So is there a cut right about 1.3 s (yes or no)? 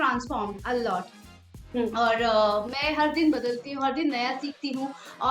no